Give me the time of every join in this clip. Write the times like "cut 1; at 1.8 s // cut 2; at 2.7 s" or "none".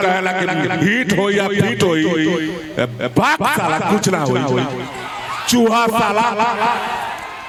none